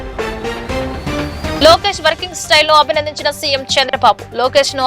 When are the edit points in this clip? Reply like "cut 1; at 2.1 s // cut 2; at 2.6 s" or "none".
cut 1; at 1.6 s